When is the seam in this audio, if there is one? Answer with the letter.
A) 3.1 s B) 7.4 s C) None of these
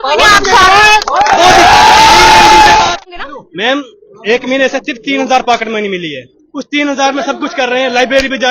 A